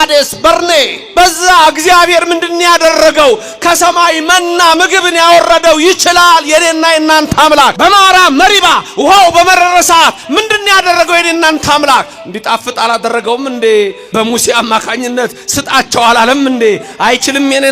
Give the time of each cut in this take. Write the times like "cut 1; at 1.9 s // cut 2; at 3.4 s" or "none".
cut 1; at 1.0 s // cut 2; at 7.3 s // cut 3; at 14.1 s